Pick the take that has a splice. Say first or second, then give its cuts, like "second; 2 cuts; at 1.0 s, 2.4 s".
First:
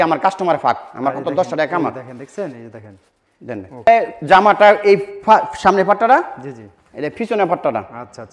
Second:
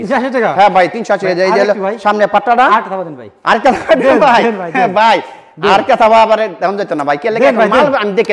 first; 1 cut; at 3.9 s